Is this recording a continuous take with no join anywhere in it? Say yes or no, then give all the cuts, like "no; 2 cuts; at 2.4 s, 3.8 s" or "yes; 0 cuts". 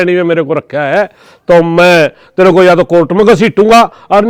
yes; 0 cuts